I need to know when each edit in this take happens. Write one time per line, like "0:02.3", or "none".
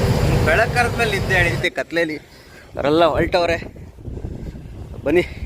0:01.6

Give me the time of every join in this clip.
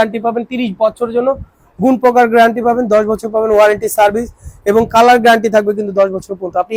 none

